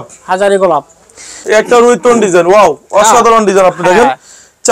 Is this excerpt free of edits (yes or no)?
no